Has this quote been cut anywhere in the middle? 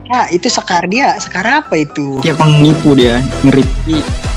yes; 1 cut; at 2.2 s

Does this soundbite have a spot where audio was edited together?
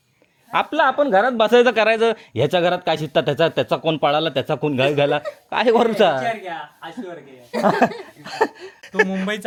no; 0 cuts

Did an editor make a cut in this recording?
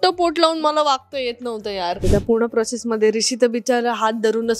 yes; 1 cut; at 2.0 s

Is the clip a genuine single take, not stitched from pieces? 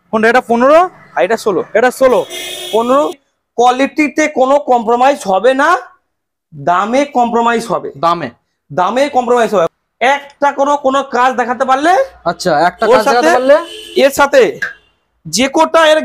no; 2 cuts; at 3.2 s, 9.7 s

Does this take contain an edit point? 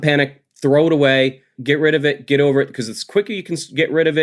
yes; 1 cut; at 1.5 s

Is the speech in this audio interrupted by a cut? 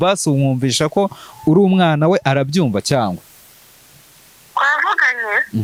no; 0 cuts

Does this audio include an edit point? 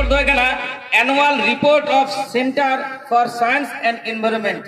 no; 0 cuts

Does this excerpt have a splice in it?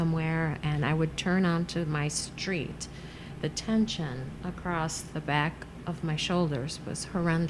no; 0 cuts

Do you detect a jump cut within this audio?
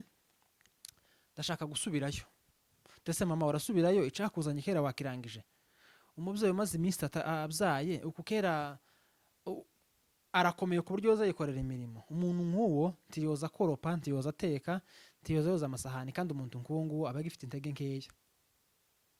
no; 0 cuts

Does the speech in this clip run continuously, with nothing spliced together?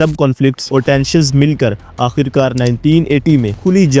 yes; 0 cuts

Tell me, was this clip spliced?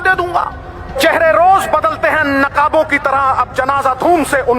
yes; 1 cut; at 1.0 s

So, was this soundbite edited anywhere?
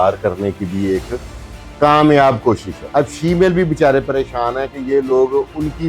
yes; 1 cut; at 2.8 s

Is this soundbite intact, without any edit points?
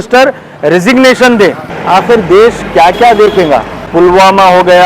no; 2 cuts; at 1.7 s, 3.8 s

